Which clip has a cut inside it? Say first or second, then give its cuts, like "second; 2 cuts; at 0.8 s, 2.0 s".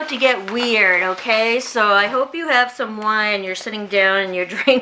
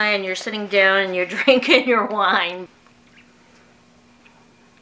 second; 1 cut; at 2.6 s